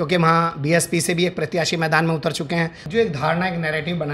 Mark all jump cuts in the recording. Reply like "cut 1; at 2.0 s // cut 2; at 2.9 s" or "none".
cut 1; at 2.8 s

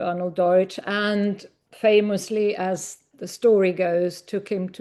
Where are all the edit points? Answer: none

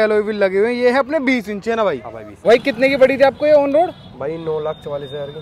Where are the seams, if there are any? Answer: cut 1; at 2.5 s

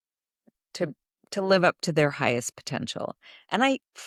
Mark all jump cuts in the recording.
none

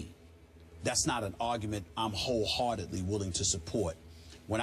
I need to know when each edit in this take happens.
cut 1; at 2.3 s

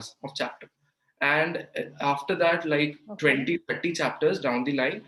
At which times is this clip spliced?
none

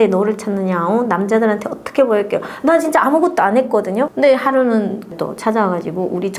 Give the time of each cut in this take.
cut 1; at 4.1 s

